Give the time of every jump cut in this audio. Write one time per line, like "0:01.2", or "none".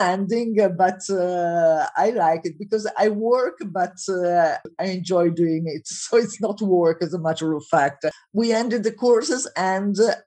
0:04.6
0:08.2